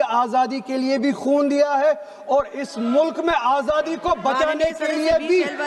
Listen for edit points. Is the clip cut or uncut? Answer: uncut